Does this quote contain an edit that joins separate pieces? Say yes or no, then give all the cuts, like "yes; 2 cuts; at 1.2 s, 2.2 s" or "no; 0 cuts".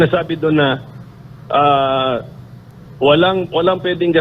no; 0 cuts